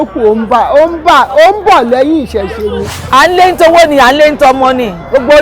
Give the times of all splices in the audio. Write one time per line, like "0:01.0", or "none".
0:02.9